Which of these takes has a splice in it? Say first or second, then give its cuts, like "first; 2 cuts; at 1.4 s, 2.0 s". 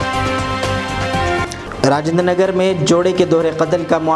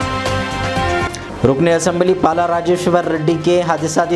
second; 1 cut; at 1.2 s